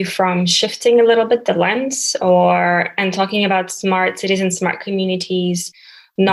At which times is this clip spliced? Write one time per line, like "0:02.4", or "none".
none